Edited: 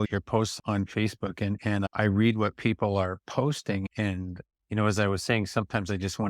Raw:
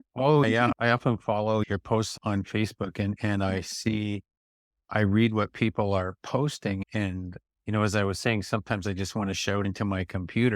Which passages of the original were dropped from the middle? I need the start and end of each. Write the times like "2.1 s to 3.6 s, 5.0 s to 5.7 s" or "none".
3.4 s to 4.8 s